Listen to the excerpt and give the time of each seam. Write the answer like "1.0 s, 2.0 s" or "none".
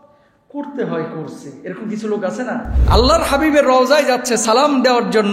2.7 s